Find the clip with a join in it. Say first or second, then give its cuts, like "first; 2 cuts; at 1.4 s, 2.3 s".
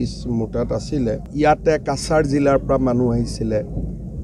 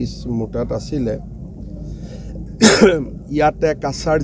first; 1 cut; at 1.2 s